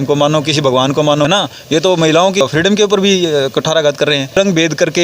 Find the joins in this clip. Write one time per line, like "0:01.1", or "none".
0:01.3
0:04.3